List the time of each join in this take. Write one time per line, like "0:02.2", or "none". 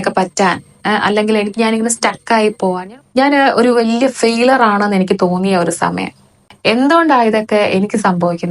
0:02.8